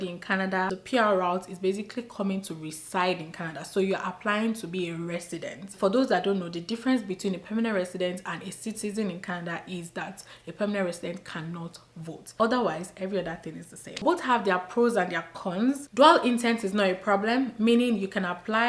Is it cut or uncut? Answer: uncut